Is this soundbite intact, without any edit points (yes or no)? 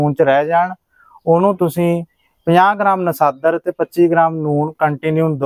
yes